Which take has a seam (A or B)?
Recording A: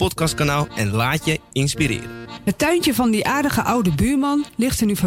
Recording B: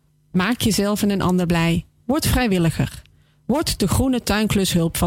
A